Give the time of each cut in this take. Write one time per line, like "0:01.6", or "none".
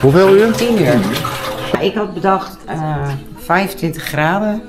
0:01.8